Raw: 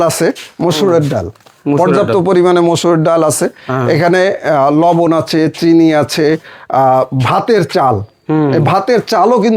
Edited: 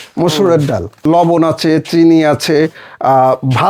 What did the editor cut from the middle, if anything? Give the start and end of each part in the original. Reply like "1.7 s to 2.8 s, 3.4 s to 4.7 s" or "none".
1.5 s to 4.7 s